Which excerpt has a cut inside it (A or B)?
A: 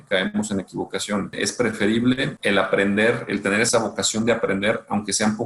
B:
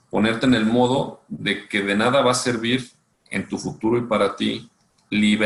A